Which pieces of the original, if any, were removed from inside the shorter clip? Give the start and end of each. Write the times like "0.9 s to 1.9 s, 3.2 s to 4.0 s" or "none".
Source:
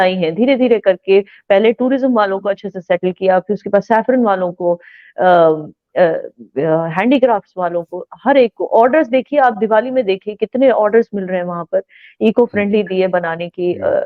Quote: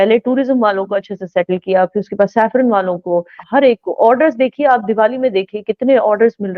4.9 s to 8.1 s